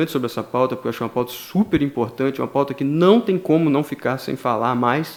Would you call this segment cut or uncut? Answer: uncut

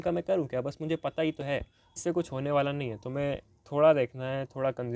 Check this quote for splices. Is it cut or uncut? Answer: cut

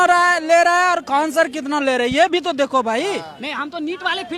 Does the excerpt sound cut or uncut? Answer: uncut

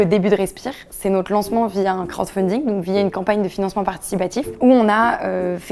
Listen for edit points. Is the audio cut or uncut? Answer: cut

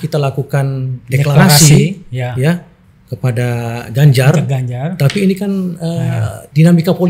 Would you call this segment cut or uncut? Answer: uncut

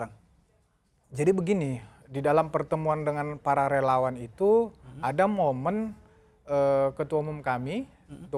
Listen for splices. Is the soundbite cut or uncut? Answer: uncut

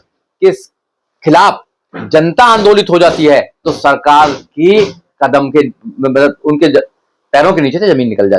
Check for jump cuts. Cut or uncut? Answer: uncut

